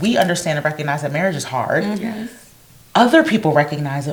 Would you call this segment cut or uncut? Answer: uncut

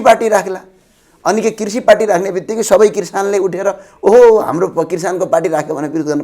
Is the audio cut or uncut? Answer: uncut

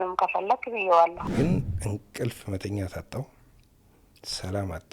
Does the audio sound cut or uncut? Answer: cut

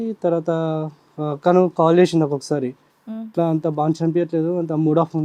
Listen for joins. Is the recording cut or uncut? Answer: uncut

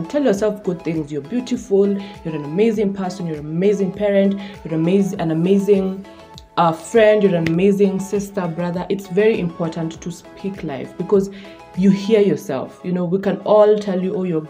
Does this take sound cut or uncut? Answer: uncut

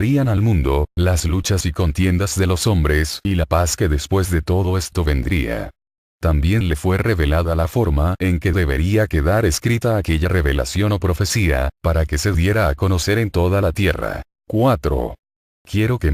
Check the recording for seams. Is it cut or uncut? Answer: uncut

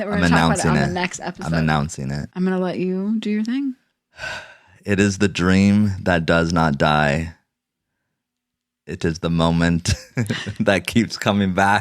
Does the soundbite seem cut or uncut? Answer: cut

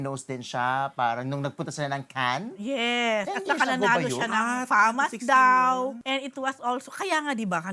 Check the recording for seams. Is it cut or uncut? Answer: cut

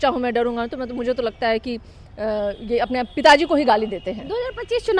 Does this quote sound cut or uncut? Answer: uncut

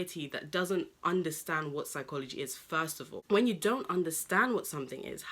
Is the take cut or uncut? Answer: cut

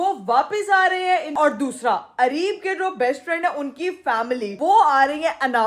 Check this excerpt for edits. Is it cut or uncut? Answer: cut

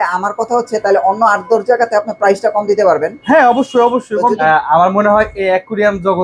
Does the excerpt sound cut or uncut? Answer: cut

